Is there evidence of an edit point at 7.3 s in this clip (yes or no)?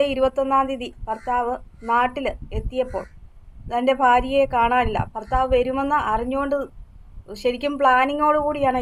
no